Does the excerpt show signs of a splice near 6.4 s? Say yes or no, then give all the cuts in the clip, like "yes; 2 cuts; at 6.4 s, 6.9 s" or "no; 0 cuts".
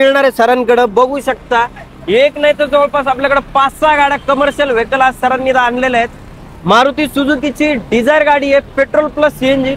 no; 0 cuts